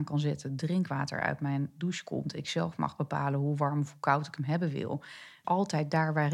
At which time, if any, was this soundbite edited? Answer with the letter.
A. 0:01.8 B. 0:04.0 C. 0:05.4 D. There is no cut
C